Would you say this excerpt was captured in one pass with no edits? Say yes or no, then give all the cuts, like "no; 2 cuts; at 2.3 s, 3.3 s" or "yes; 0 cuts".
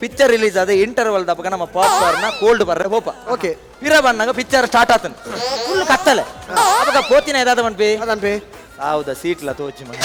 yes; 0 cuts